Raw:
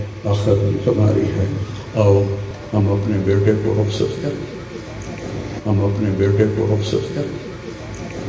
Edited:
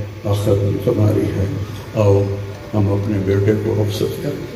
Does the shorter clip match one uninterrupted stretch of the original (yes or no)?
no